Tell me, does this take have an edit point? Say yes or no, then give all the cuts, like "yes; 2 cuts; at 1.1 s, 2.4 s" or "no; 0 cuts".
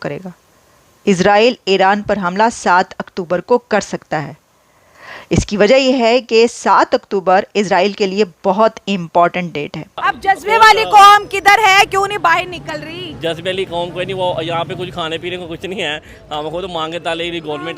yes; 1 cut; at 10.0 s